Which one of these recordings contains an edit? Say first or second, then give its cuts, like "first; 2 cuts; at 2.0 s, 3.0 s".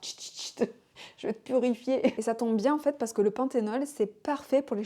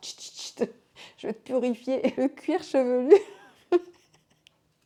first; 1 cut; at 2.1 s